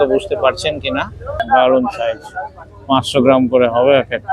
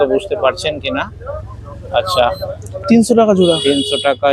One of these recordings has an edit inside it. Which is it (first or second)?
first